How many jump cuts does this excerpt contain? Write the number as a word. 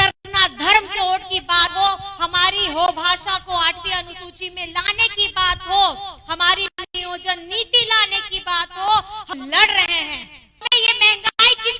one